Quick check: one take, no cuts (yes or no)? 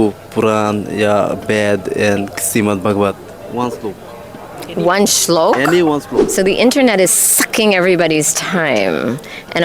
no